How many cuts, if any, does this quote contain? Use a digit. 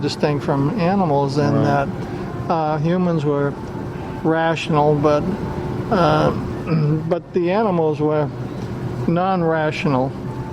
0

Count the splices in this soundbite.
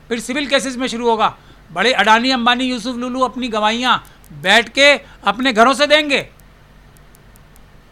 0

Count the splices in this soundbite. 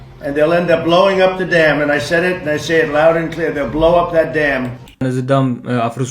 1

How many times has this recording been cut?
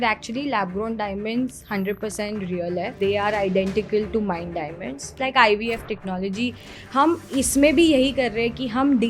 2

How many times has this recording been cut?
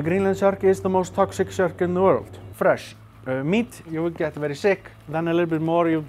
3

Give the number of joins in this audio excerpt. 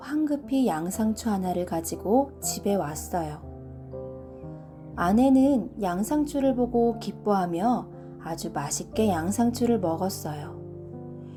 0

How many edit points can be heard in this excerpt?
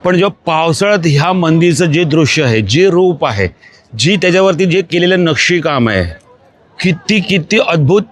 0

